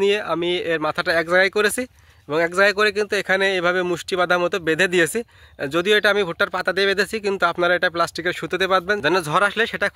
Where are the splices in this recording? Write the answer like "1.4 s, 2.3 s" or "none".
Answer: 9.0 s